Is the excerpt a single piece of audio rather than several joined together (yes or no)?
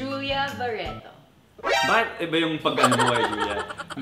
yes